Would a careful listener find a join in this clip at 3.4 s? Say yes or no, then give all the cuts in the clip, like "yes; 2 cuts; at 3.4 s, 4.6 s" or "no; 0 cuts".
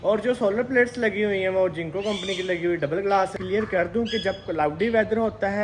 yes; 1 cut; at 3.4 s